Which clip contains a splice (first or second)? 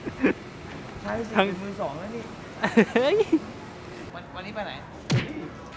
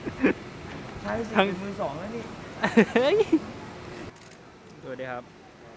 first